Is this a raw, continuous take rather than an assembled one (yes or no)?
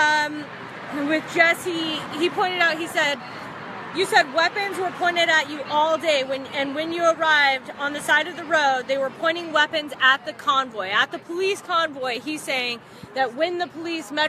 no